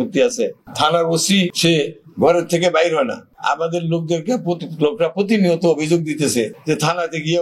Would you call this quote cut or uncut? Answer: uncut